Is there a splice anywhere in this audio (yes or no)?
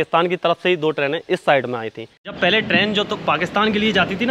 yes